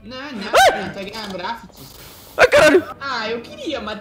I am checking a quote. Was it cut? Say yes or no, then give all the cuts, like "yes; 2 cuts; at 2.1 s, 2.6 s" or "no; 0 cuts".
yes; 1 cut; at 3.0 s